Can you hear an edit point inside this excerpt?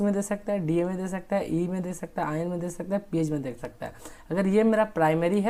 no; 0 cuts

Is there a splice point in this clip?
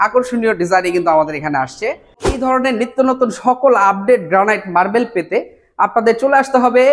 yes; 1 cut; at 2.4 s

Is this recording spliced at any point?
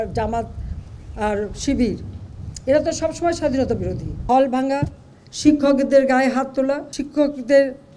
yes; 2 cuts; at 4.1 s, 6.9 s

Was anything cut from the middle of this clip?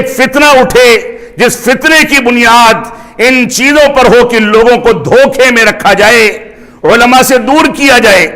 no; 0 cuts

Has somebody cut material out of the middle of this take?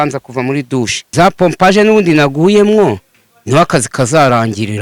yes; 1 cut; at 1.0 s

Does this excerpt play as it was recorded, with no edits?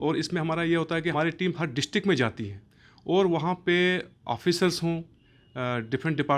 no; 1 cut; at 1.1 s

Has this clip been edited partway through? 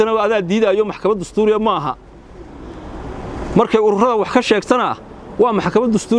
no; 0 cuts

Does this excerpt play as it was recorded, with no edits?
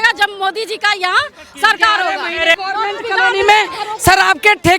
no; 1 cut; at 2.6 s

